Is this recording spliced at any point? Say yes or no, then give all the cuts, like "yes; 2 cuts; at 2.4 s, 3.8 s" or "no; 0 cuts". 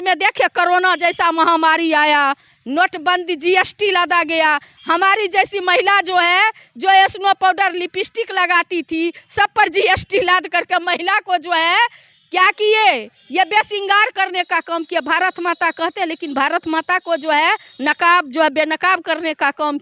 no; 0 cuts